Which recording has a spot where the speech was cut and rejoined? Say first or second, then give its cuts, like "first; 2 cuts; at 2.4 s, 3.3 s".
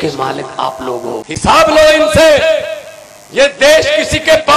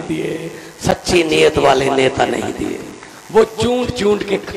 first; 1 cut; at 1.2 s